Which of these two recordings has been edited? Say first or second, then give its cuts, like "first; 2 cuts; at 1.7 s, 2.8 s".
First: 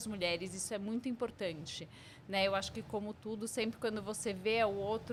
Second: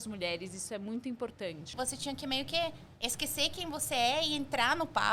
second; 1 cut; at 1.7 s